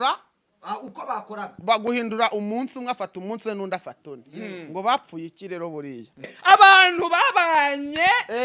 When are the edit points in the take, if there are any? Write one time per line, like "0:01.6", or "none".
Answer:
0:06.3